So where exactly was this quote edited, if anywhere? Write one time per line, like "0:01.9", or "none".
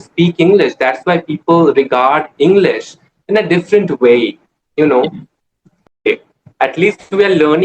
0:05.9